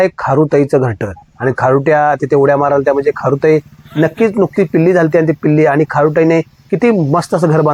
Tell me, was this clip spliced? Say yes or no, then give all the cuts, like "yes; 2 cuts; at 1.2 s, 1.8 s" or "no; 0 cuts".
no; 0 cuts